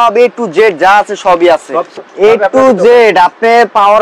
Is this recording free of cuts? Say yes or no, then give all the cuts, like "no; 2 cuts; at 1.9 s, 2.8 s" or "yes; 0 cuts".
no; 1 cut; at 2.0 s